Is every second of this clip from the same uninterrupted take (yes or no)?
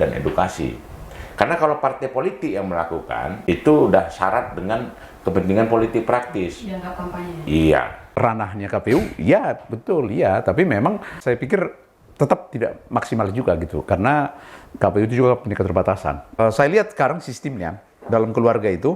no